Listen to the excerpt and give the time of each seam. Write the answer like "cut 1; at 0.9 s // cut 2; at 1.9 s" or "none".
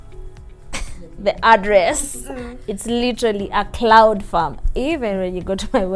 none